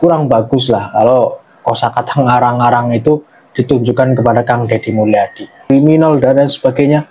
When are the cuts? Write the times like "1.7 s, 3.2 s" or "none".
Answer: 5.7 s